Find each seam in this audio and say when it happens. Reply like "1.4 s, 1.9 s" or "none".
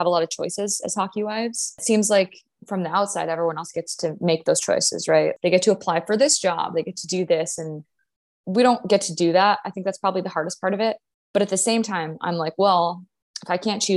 1.8 s, 5.4 s